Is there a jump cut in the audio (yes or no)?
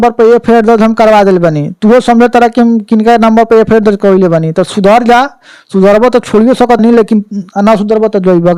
no